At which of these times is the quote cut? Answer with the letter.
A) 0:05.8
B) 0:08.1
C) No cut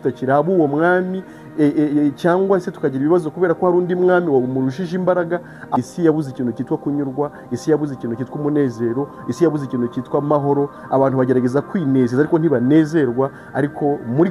A